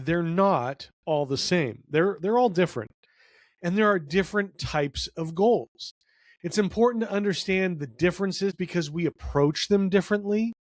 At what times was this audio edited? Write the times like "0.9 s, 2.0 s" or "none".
8.6 s